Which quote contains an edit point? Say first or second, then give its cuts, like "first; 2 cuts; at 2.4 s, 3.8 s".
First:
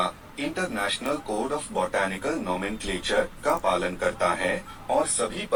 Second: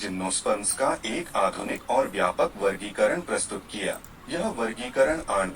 second; 1 cut; at 4.1 s